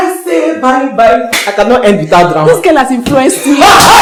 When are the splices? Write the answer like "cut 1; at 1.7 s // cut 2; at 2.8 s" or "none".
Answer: none